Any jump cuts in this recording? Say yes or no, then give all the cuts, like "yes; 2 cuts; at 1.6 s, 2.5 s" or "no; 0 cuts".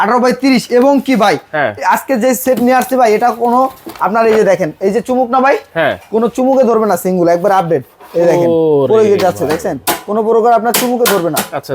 no; 0 cuts